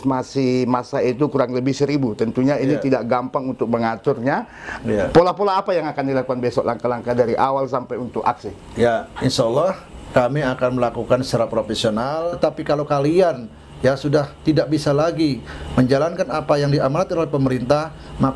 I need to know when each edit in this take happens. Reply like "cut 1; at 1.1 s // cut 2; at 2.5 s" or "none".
cut 1; at 12.3 s